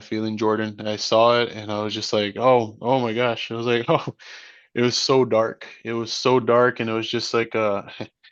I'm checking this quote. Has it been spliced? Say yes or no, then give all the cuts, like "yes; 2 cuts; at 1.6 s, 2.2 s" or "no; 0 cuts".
no; 0 cuts